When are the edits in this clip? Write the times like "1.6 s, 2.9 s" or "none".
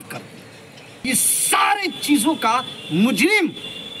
1.1 s